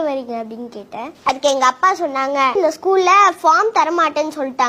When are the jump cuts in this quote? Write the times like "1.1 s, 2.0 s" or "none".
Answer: 2.6 s